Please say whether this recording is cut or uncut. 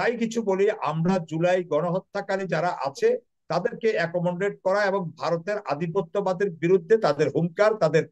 uncut